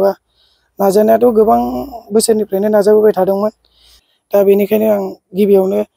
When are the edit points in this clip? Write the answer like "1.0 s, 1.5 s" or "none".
4.0 s